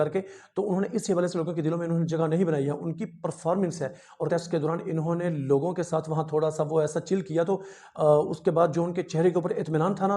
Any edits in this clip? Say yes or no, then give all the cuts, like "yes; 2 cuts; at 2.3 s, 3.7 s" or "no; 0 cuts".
yes; 1 cut; at 4.3 s